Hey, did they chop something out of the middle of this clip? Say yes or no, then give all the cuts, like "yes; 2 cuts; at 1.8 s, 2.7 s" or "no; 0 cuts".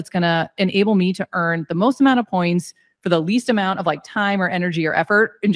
no; 0 cuts